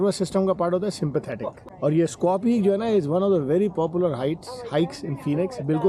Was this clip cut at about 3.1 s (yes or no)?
no